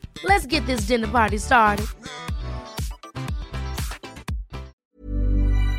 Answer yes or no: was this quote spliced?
yes